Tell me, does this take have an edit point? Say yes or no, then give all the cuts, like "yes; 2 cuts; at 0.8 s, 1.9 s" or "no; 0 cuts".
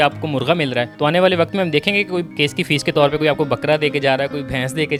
no; 0 cuts